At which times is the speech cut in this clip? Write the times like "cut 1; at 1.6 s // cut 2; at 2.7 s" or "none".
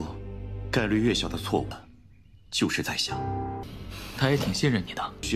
none